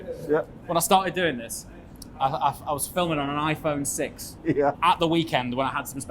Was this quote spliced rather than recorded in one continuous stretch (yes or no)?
yes